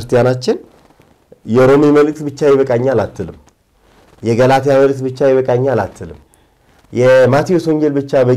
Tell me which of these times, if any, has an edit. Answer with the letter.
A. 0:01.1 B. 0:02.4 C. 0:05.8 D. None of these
D